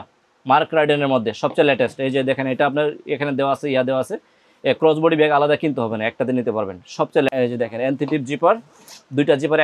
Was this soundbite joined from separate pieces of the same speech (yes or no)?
yes